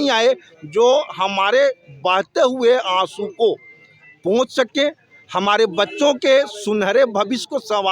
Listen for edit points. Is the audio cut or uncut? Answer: uncut